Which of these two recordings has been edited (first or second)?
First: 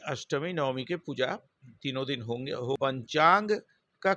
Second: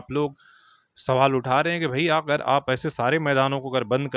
first